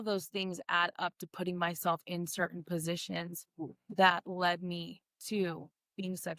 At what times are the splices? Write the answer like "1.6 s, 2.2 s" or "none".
none

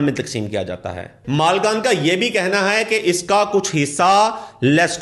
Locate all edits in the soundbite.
1.2 s

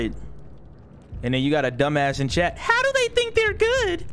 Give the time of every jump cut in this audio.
none

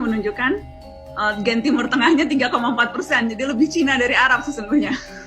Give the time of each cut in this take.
none

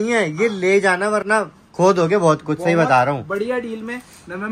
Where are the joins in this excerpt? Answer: none

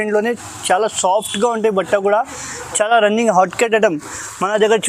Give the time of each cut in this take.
none

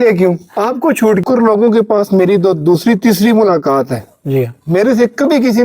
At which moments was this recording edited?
1.2 s

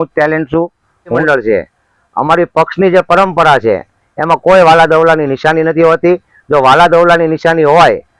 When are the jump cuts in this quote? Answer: 1.2 s

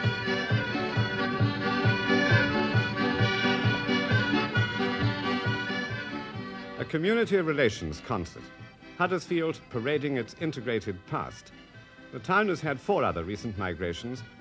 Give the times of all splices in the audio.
none

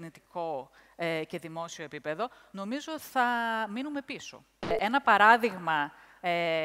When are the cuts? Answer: 4.7 s

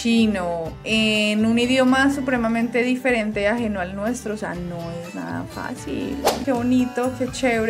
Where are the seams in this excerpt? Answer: 6.4 s

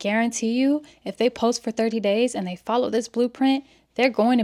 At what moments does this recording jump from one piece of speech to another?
none

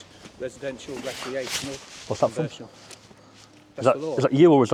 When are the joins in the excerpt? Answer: none

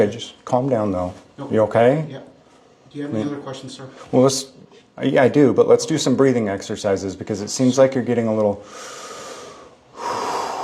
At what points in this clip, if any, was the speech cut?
none

